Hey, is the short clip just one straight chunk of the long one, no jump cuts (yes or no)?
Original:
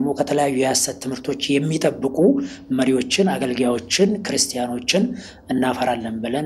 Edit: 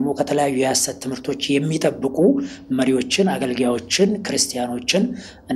yes